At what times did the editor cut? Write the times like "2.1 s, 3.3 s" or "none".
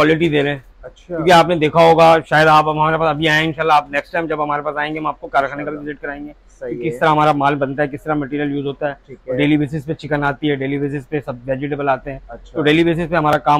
none